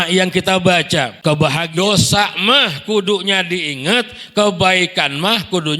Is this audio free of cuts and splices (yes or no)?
no